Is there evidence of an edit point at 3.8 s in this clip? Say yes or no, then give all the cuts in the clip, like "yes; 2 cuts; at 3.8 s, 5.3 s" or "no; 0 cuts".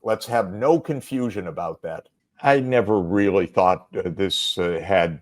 no; 1 cut; at 2.1 s